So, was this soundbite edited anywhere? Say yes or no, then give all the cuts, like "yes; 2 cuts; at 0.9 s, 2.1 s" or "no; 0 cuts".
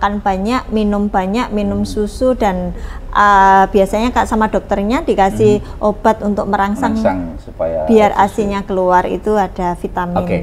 no; 0 cuts